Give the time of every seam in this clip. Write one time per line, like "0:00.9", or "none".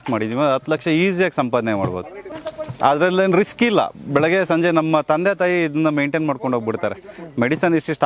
none